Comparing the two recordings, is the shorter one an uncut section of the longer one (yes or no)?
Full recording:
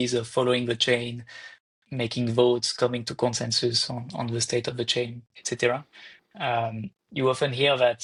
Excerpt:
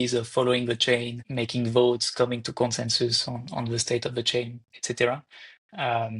no